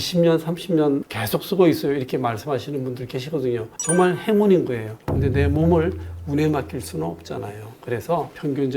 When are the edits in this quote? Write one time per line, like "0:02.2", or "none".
0:05.0